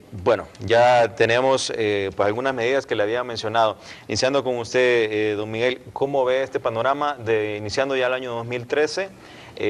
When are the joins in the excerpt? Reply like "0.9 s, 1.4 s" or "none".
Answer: 2.9 s